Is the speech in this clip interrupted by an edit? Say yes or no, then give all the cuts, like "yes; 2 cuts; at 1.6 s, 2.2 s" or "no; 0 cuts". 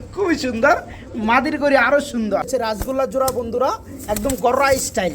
yes; 1 cut; at 3.0 s